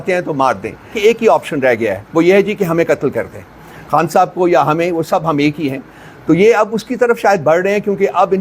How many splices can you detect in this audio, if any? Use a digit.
1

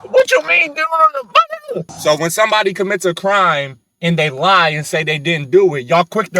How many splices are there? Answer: 1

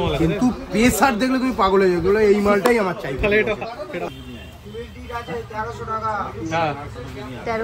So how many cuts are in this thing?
1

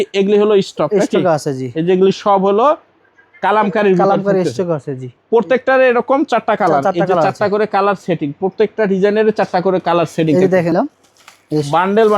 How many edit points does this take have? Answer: 1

